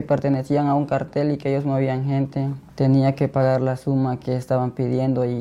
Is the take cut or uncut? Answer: cut